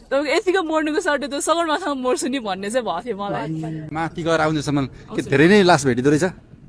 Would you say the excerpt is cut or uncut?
cut